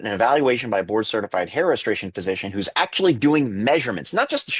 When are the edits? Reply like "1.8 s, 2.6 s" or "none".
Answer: none